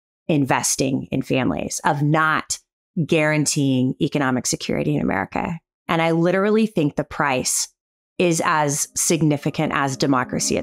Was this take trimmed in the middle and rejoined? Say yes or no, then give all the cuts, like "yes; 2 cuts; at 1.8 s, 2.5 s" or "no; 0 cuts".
no; 0 cuts